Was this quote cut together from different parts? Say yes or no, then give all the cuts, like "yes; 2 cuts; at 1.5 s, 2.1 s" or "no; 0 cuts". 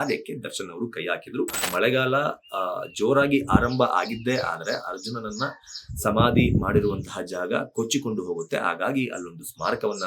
yes; 1 cut; at 1.6 s